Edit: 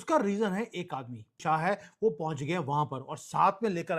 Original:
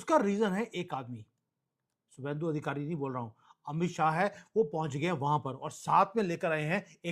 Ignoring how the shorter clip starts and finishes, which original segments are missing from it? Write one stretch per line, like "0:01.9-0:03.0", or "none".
0:01.4-0:03.9

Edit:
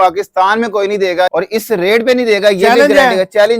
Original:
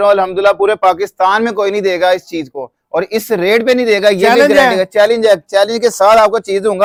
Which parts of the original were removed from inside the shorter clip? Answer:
0:02.1-0:02.9

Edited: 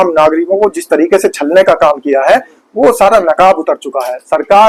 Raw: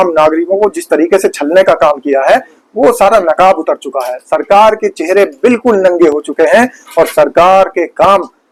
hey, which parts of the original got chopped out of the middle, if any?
none

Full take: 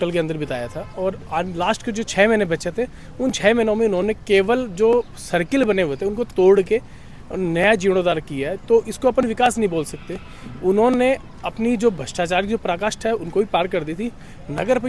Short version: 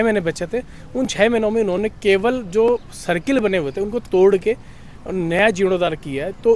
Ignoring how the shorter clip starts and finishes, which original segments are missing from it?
none

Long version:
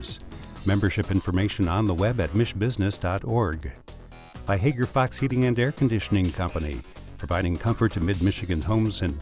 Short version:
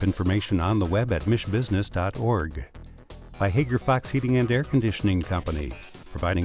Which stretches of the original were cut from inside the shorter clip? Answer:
none

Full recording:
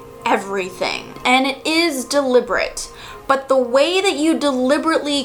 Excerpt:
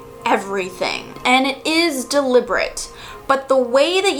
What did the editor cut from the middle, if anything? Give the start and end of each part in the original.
none

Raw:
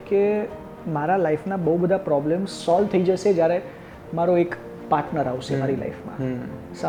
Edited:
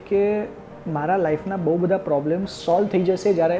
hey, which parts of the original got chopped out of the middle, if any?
none

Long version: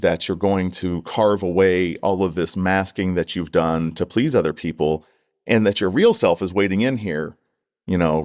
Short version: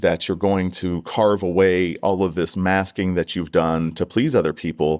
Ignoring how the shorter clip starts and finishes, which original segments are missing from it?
none

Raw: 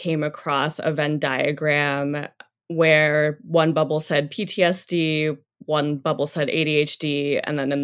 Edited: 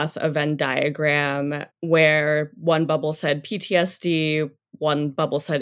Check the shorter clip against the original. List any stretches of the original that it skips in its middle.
0:02.3-0:02.6

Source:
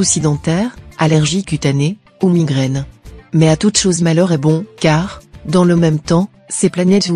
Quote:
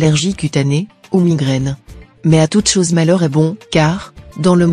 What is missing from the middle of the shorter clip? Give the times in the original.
none

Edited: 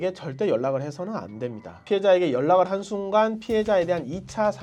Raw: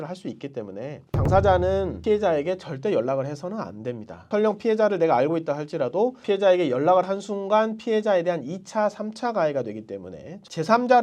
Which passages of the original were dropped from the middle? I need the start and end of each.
0:04.2-0:06.2

